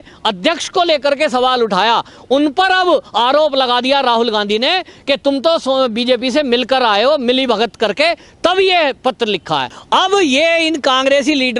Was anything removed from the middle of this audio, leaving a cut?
yes; 1 cut; at 9.7 s

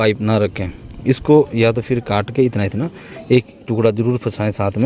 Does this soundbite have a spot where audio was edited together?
no; 0 cuts

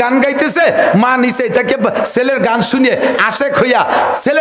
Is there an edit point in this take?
no; 0 cuts

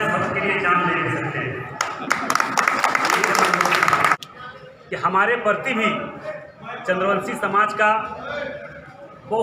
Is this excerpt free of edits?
no; 1 cut; at 4.2 s

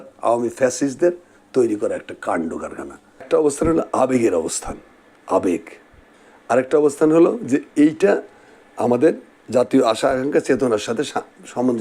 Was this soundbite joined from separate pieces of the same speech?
yes; 1 cut; at 3.3 s

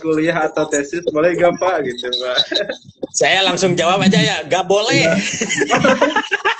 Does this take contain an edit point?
no; 0 cuts

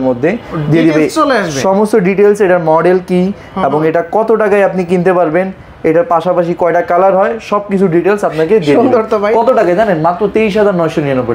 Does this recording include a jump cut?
no; 0 cuts

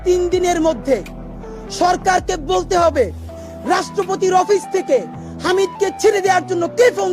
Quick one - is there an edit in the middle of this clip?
no; 0 cuts

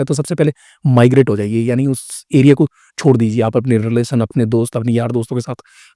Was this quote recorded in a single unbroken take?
yes; 0 cuts

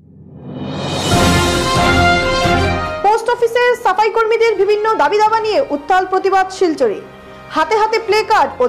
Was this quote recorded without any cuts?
yes; 0 cuts

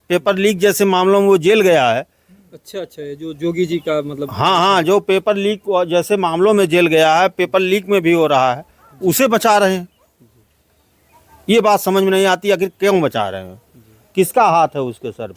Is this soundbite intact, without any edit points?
yes; 0 cuts

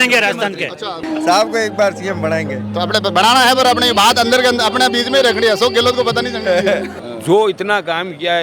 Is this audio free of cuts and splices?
no; 2 cuts; at 1.0 s, 6.9 s

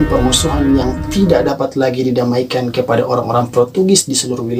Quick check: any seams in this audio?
no; 0 cuts

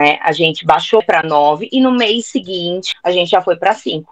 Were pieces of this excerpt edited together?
yes; 2 cuts; at 1.0 s, 2.8 s

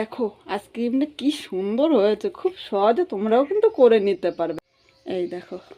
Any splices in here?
yes; 1 cut; at 4.6 s

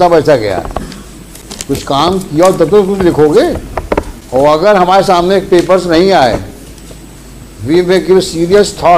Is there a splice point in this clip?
no; 0 cuts

